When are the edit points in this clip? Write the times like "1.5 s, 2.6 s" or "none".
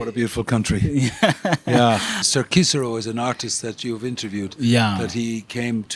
2.2 s